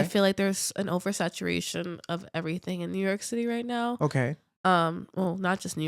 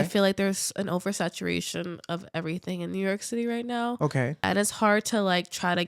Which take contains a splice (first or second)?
second